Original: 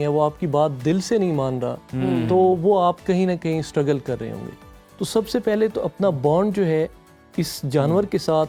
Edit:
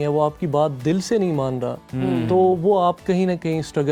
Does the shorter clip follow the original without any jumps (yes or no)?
yes